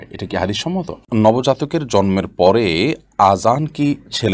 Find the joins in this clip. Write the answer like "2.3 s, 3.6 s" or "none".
1.0 s